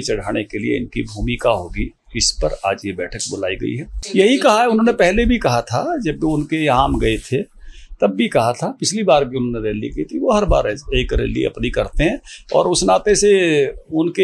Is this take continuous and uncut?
no; 1 cut; at 3.9 s

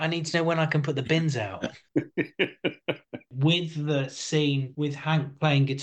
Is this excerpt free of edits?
no; 3 cuts; at 1.8 s, 3.3 s, 4.7 s

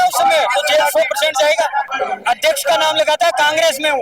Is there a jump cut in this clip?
yes; 1 cut; at 1.9 s

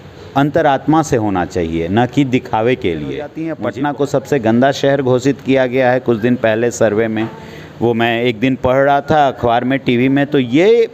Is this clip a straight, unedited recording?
no; 1 cut; at 3.5 s

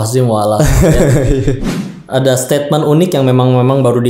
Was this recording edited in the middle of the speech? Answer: yes; 1 cut; at 1.6 s

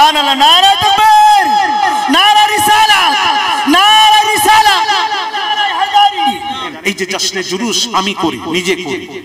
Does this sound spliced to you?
yes; 1 cut; at 6.7 s

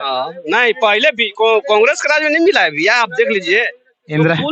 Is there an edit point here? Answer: no; 0 cuts

